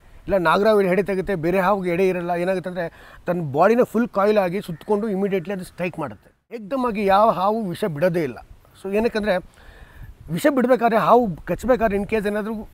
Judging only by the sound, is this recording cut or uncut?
cut